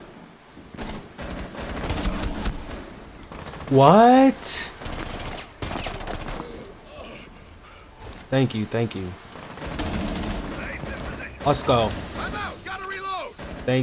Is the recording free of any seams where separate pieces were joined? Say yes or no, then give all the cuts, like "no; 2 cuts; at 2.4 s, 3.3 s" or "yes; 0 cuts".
yes; 0 cuts